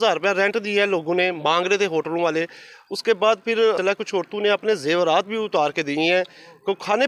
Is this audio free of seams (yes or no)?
yes